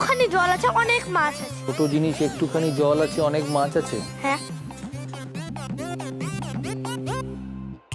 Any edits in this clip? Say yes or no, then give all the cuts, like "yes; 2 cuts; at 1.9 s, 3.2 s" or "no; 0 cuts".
no; 0 cuts